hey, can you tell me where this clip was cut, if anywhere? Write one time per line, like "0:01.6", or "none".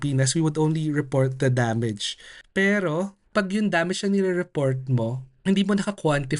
0:02.5
0:03.3
0:05.3